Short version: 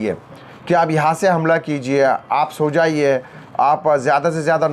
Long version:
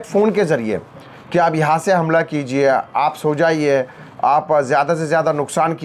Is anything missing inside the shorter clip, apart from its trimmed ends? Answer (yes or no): no